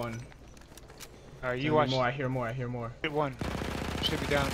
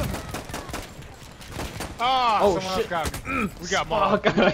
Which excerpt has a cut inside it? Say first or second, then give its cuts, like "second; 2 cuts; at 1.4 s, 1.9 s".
first; 1 cut; at 3.0 s